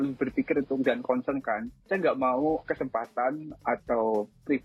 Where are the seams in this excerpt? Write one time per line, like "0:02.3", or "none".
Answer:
none